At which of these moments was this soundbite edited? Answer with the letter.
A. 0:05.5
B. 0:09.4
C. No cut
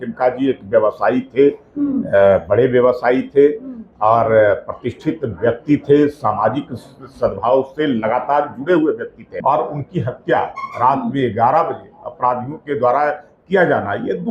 B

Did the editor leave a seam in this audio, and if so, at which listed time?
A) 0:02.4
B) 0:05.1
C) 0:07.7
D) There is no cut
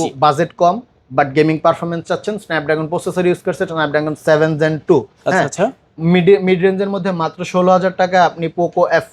D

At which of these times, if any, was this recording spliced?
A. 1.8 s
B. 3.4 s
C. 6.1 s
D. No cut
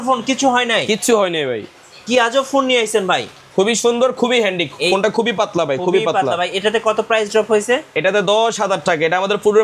B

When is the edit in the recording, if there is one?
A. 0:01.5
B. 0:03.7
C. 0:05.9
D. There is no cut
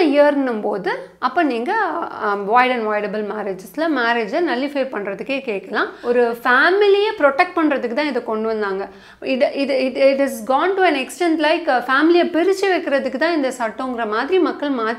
C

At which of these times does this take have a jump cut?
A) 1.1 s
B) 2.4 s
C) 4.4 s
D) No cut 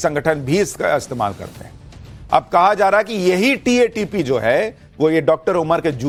D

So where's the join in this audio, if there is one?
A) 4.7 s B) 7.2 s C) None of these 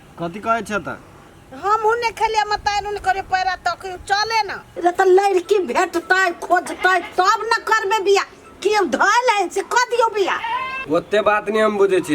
A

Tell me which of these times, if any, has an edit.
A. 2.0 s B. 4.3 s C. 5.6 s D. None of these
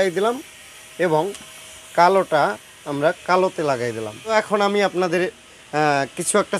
B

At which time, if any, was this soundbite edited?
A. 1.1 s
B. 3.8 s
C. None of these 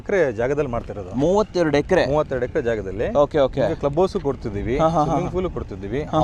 C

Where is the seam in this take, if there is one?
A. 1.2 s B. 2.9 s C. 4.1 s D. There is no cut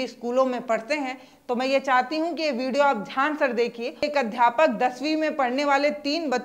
C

